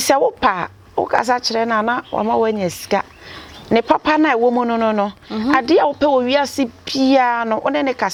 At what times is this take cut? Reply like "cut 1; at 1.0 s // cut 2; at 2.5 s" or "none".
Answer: none